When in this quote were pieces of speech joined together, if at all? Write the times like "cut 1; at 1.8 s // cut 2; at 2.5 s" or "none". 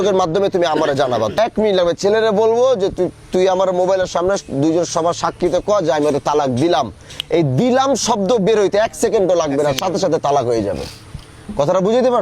cut 1; at 1.4 s